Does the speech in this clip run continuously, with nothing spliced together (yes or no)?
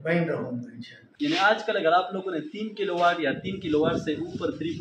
no